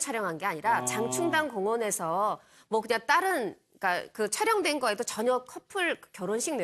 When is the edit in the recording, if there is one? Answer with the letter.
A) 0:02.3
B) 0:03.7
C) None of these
A